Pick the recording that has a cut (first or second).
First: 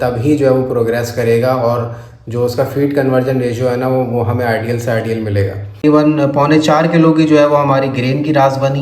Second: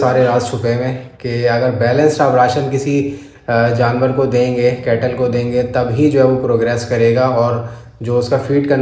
first